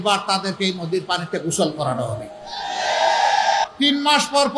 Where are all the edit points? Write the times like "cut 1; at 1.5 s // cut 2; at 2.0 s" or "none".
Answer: cut 1; at 3.6 s